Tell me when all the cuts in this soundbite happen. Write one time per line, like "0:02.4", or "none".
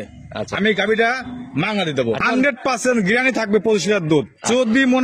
0:02.2